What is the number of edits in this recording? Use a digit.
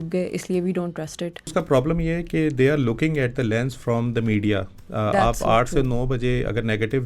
1